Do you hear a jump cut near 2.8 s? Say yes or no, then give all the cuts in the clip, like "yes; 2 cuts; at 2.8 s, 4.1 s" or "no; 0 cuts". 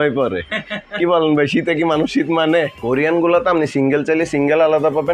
yes; 1 cut; at 2.8 s